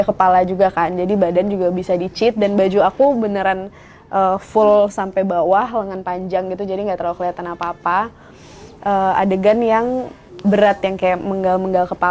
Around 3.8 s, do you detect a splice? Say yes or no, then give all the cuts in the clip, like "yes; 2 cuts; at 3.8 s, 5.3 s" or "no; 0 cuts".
no; 0 cuts